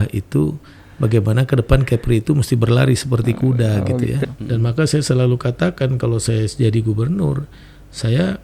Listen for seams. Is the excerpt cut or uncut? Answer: cut